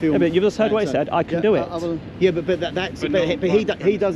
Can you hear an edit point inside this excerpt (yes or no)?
no